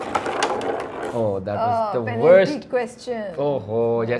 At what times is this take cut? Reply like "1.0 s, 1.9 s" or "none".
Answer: none